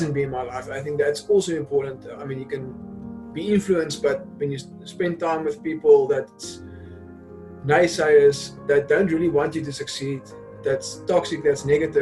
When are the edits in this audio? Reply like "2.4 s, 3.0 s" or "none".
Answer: none

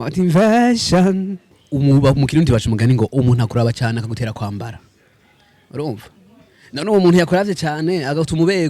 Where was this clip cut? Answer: 1.7 s

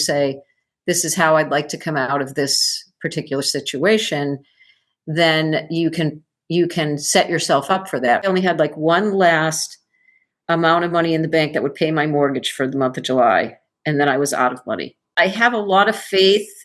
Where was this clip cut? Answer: 8.2 s, 15.1 s

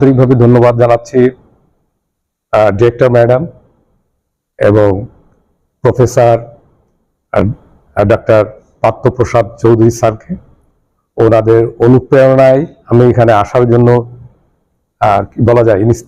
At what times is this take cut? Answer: none

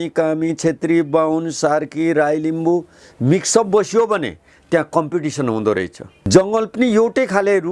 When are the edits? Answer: 6.3 s

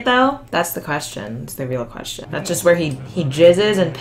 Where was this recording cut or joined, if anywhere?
2.2 s

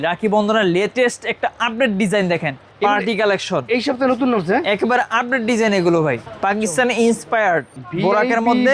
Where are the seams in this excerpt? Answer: 2.6 s, 6.3 s, 7.8 s

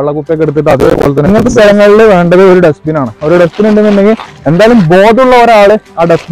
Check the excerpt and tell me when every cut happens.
1.3 s

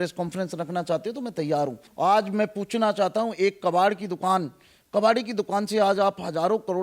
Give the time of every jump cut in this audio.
1.9 s

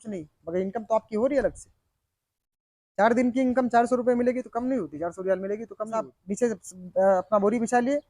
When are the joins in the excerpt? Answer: 6.2 s

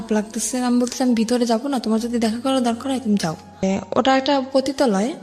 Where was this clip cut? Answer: 3.6 s

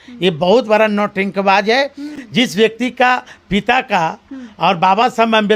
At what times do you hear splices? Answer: none

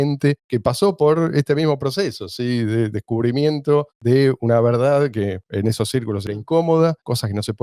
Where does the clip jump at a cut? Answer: none

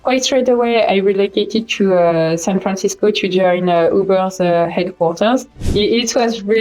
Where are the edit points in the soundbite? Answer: 5.7 s

